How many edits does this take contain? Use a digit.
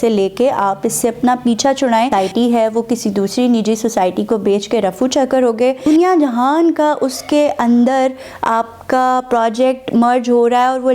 2